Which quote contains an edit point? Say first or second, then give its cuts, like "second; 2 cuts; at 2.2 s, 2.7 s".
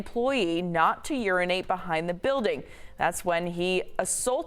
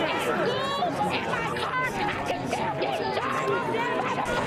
first; 1 cut; at 1.4 s